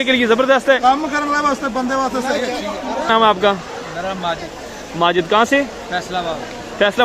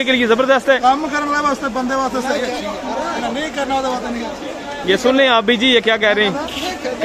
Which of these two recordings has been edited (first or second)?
first